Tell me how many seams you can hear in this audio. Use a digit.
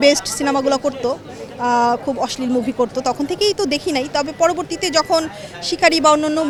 0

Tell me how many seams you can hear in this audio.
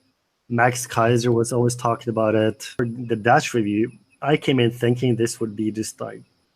1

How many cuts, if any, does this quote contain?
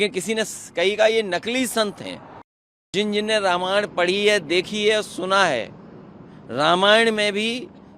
1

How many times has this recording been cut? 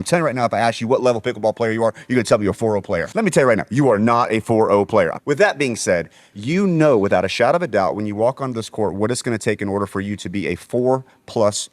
3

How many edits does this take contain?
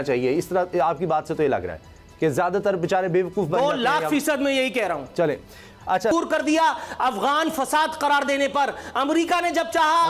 1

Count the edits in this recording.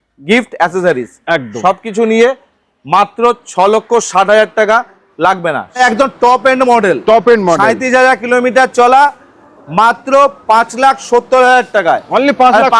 1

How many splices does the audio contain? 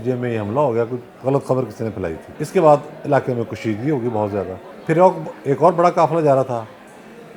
2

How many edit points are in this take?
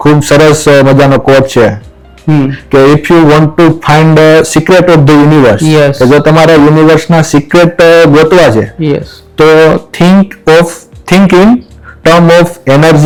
0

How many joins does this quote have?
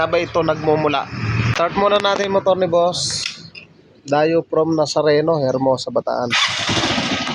1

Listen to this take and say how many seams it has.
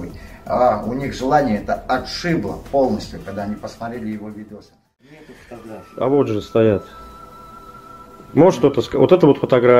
1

